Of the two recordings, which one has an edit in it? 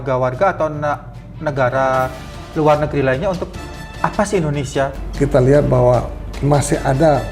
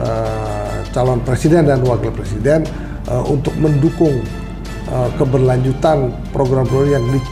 first; 1 cut; at 5.0 s

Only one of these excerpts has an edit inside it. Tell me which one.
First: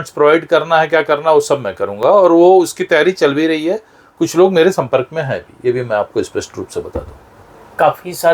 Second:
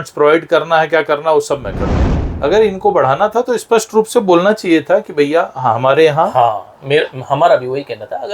second; 1 cut; at 1.9 s

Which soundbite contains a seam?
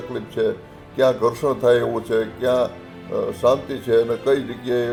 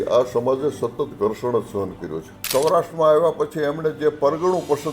second; 1 cut; at 2.3 s

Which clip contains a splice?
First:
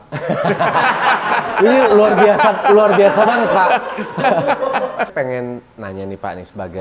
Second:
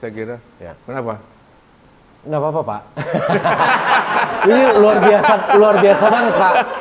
first; 1 cut; at 5.1 s

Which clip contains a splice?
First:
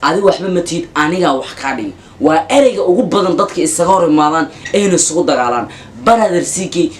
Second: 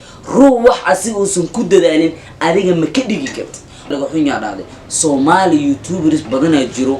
second; 1 cut; at 3.9 s

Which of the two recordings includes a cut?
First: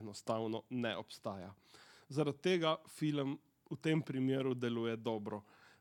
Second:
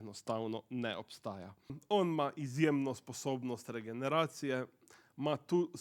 second; 1 cut; at 1.8 s

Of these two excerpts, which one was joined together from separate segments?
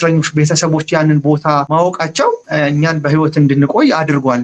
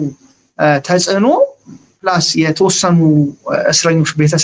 first; 2 cuts; at 1.7 s, 2.4 s

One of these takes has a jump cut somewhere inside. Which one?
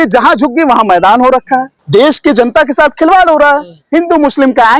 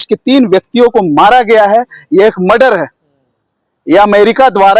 first; 1 cut; at 1.7 s

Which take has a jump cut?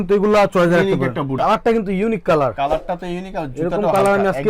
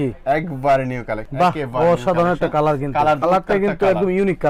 first; 1 cut; at 1.3 s

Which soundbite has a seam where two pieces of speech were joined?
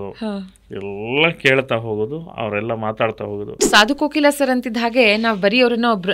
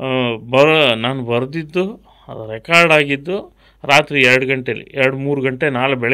first; 1 cut; at 3.6 s

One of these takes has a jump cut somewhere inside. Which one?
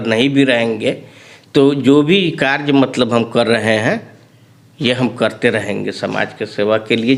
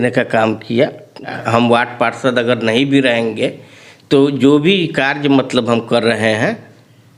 second; 1 cut; at 1.3 s

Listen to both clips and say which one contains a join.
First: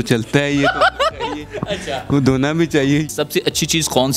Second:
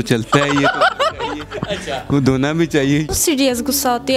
second; 1 cut; at 3.1 s

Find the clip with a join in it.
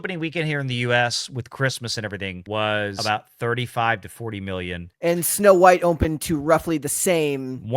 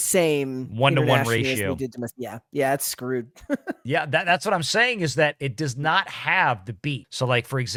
first; 3 cuts; at 2.4 s, 3.0 s, 4.8 s

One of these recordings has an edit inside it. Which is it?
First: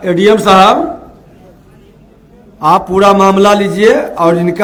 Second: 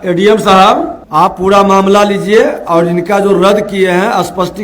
second; 1 cut; at 1.0 s

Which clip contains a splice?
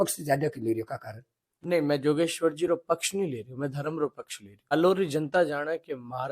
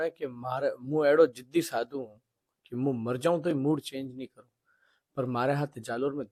first; 1 cut; at 4.7 s

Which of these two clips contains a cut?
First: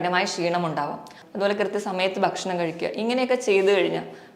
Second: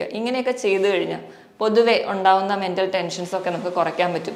first; 1 cut; at 1.2 s

